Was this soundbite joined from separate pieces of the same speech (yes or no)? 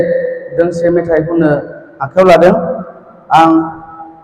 no